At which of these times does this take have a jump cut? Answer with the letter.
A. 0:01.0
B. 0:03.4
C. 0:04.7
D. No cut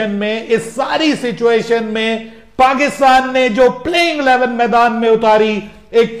D